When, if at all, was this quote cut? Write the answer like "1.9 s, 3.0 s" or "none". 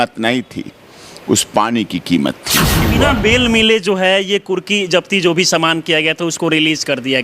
2.8 s